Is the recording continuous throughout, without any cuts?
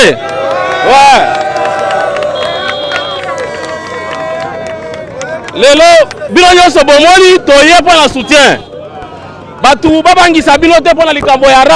yes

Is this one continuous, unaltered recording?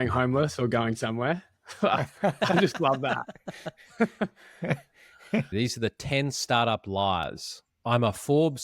no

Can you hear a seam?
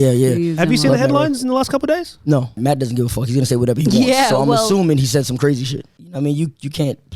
yes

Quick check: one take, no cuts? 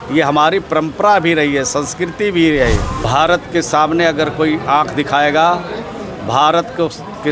no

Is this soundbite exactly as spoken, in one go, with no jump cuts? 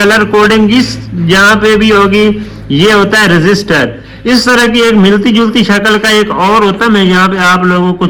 yes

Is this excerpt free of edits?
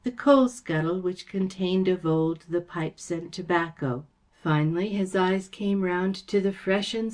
no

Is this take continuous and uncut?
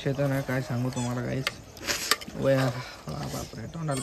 yes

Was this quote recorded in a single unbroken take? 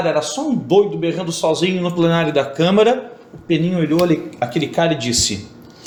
yes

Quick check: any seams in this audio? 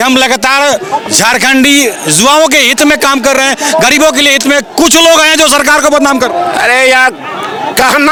no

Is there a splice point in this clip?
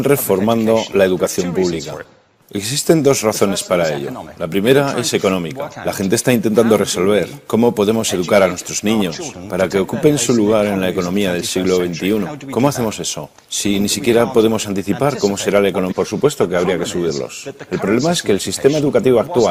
no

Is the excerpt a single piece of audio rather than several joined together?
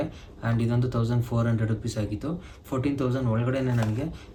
yes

